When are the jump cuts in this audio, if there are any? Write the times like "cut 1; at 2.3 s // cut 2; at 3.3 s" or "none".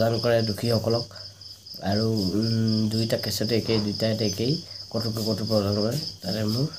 none